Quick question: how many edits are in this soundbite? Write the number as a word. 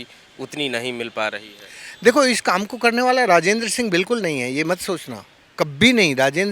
zero